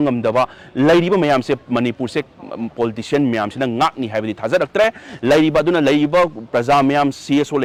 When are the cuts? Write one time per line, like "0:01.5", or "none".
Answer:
none